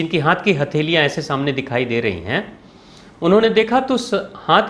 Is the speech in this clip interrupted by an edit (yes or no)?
no